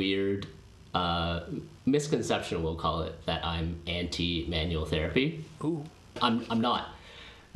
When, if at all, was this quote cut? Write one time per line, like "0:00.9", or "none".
0:06.2